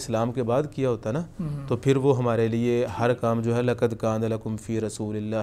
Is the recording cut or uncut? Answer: uncut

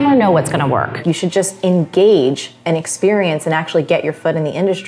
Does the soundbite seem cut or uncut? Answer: cut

